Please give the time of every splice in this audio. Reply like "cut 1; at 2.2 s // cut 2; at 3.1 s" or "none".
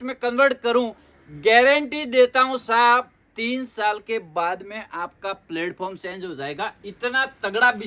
none